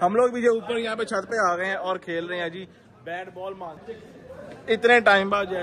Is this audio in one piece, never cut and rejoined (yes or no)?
no